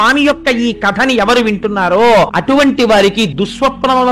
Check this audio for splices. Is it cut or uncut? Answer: cut